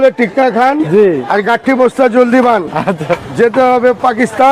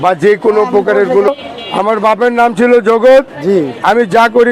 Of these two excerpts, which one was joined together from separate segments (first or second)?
second